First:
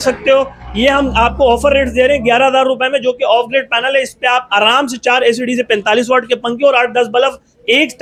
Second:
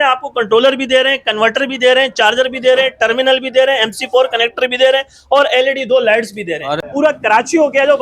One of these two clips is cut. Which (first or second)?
second